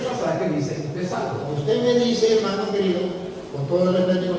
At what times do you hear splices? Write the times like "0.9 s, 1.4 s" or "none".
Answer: 1.5 s